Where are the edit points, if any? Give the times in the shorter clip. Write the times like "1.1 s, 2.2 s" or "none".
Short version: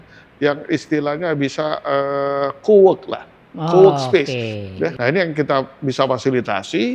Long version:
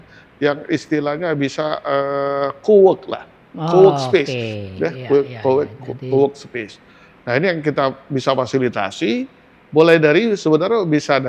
5.0 s